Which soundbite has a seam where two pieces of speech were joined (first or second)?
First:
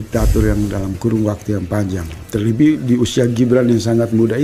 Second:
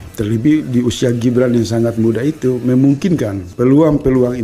second